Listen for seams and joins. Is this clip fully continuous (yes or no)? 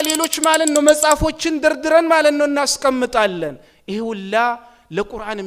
yes